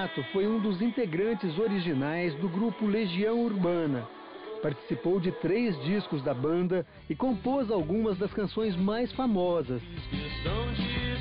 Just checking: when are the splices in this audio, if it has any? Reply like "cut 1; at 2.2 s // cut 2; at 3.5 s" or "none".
cut 1; at 8.8 s